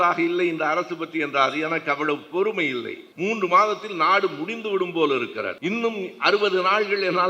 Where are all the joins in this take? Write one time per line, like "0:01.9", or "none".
0:03.0
0:05.5

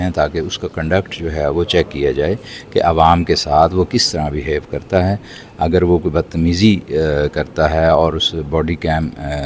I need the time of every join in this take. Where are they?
none

